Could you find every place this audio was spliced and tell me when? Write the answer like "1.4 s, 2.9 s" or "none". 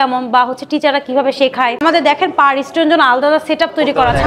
1.8 s